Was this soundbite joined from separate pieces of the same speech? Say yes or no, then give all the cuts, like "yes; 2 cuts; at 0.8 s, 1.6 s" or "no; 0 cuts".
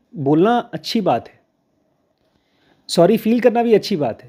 no; 0 cuts